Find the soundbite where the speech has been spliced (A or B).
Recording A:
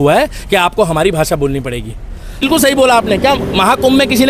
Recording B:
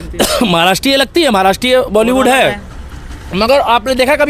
A